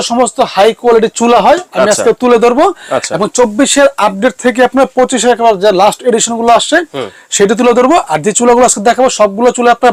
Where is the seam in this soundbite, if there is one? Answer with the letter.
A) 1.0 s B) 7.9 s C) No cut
C